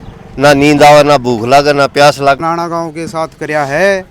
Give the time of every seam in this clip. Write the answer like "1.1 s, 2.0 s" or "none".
2.4 s